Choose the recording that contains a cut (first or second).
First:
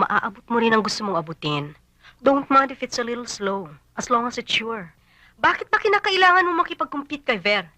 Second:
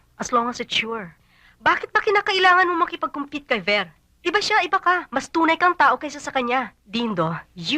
second